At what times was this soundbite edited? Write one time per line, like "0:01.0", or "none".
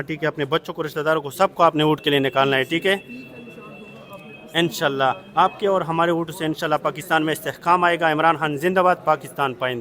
none